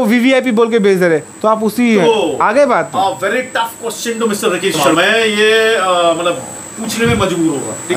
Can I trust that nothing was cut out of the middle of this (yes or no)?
yes